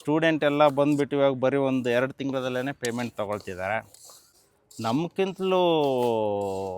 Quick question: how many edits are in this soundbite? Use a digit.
1